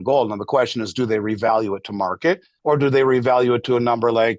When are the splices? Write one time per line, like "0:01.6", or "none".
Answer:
0:02.5

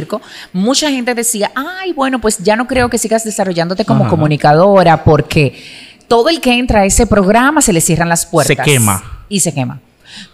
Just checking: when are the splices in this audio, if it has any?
none

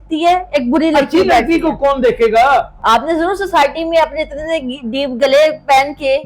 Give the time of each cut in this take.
0:02.7

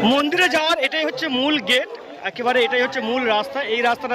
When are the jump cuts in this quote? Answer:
none

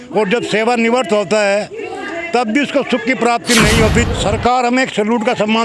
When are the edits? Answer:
0:04.1

